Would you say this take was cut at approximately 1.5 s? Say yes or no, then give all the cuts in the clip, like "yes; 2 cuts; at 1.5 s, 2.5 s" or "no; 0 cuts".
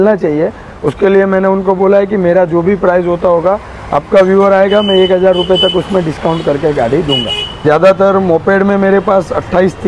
no; 1 cut; at 7.5 s